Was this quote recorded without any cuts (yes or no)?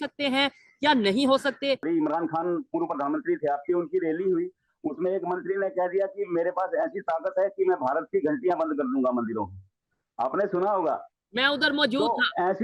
no